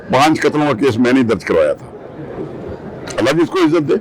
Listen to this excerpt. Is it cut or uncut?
uncut